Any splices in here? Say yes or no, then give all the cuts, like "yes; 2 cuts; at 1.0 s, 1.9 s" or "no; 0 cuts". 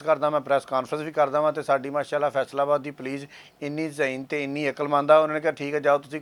no; 0 cuts